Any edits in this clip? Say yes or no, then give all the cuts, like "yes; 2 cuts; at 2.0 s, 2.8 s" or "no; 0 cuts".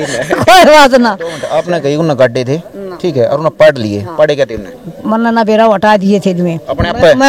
yes; 1 cut; at 1.5 s